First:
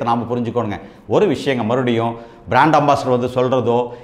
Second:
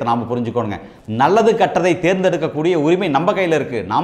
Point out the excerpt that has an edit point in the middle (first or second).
second